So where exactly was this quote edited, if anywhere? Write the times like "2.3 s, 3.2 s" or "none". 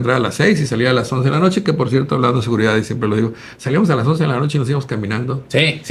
none